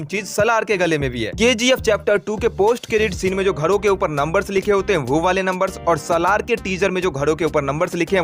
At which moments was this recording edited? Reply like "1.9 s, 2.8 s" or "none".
1.3 s